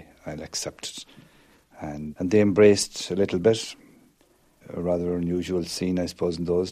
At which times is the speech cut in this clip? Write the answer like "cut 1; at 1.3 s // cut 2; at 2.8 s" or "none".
cut 1; at 2.1 s